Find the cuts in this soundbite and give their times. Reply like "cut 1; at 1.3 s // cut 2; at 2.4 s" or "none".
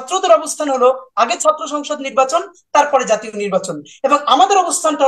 none

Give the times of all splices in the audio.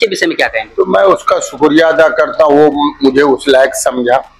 none

